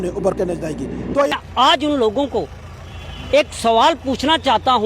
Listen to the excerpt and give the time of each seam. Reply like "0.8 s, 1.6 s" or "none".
1.4 s